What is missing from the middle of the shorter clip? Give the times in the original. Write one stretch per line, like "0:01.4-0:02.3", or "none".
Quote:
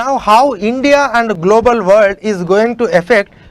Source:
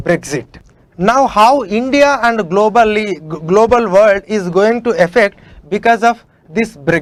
0:02.4-0:03.4